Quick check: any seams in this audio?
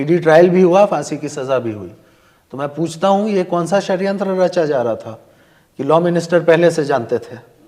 no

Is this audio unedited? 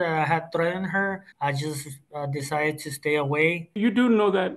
no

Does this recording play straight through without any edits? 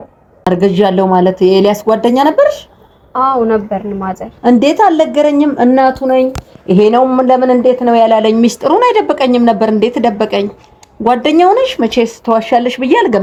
yes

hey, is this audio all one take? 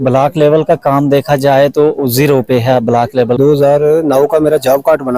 no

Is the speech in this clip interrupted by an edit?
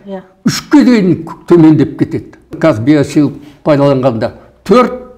yes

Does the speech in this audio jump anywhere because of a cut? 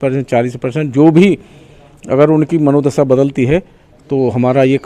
no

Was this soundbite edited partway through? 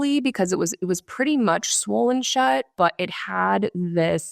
yes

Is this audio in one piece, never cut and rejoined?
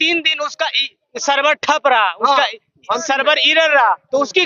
yes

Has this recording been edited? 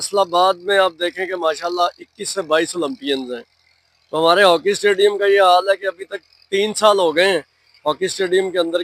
no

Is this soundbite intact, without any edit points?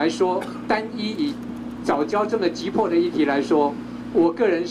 yes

